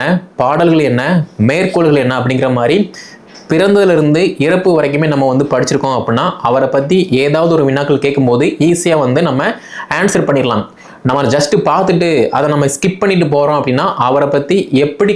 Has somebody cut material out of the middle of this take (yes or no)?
no